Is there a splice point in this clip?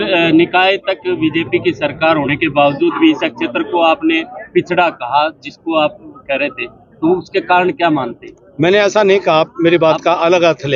no; 0 cuts

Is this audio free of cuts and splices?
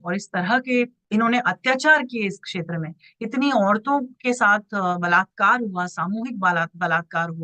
no; 1 cut; at 1.0 s

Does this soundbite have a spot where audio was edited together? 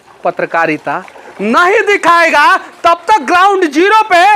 no; 0 cuts

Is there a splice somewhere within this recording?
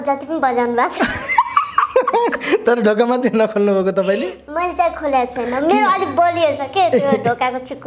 no; 0 cuts

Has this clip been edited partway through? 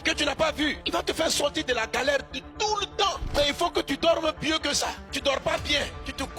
no; 0 cuts

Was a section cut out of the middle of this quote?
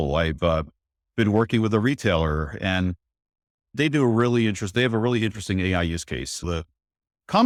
no; 0 cuts

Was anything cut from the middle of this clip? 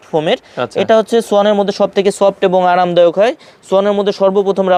no; 0 cuts

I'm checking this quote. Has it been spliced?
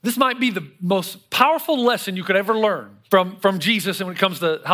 yes; 1 cut; at 2.9 s

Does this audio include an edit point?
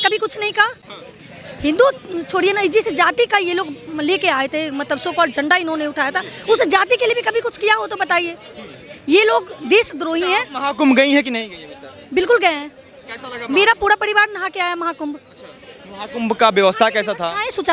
no; 0 cuts

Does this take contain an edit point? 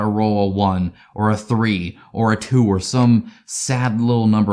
no; 0 cuts

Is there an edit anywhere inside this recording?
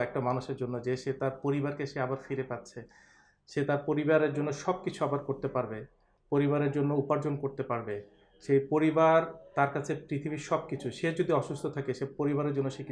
no; 0 cuts

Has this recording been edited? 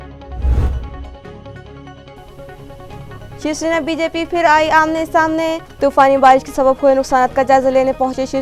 no; 0 cuts

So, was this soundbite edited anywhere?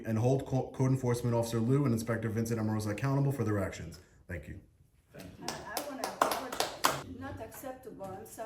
yes; 1 cut; at 7.0 s

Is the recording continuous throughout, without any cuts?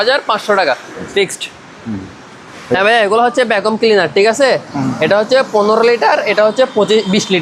yes; 0 cuts

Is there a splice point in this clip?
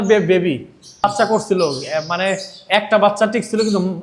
yes; 1 cut; at 1.0 s

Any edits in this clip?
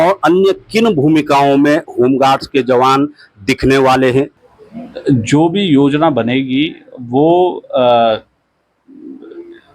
yes; 1 cut; at 4.3 s

